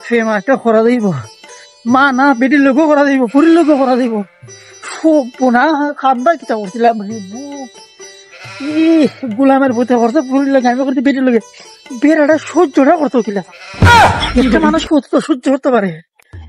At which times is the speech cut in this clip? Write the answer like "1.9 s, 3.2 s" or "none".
none